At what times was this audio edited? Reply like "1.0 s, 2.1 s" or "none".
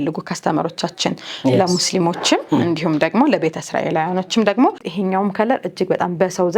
4.8 s